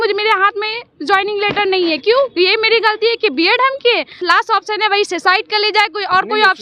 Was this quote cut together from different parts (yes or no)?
yes